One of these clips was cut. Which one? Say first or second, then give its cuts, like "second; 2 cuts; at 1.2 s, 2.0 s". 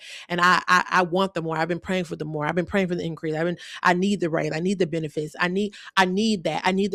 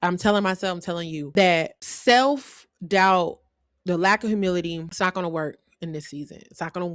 second; 3 cuts; at 1.3 s, 1.8 s, 4.9 s